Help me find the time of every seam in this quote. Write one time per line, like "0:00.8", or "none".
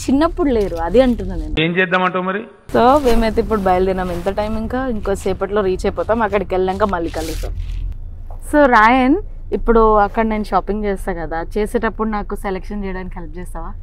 none